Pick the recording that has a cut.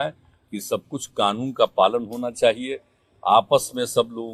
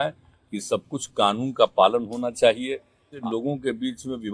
second; 1 cut; at 3.2 s

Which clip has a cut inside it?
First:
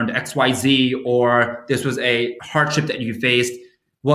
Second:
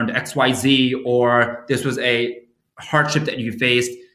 first; 1 cut; at 2.4 s

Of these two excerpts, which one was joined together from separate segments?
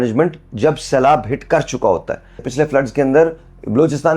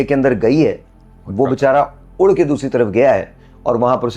first; 1 cut; at 2.5 s

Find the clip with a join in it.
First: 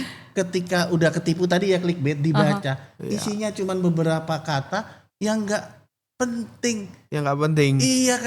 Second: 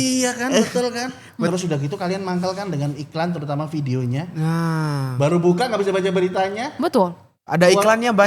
second; 1 cut; at 1.5 s

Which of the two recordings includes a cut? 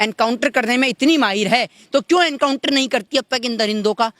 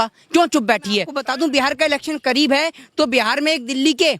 second; 1 cut; at 1.2 s

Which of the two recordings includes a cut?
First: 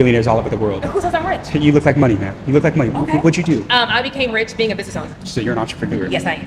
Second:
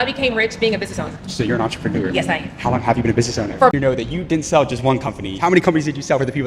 second; 1 cut; at 3.7 s

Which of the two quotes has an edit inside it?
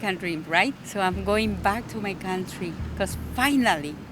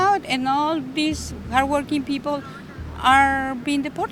first; 2 cuts; at 0.8 s, 2.8 s

